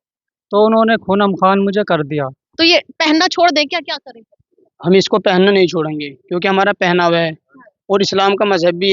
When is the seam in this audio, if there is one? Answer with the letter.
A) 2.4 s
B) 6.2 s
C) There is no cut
A